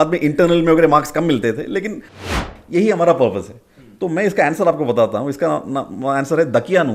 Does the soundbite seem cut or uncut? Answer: cut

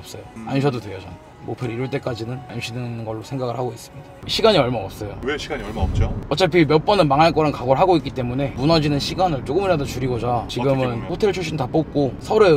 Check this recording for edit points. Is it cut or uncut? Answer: cut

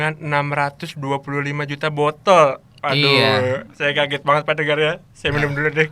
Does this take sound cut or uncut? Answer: uncut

